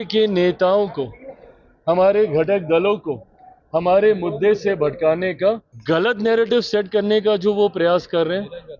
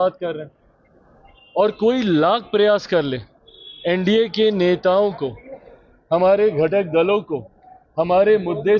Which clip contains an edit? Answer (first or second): first